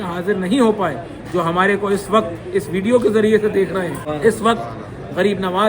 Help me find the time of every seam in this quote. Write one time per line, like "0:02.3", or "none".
0:04.0